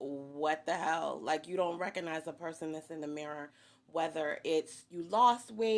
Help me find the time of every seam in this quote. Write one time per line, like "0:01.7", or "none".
0:01.2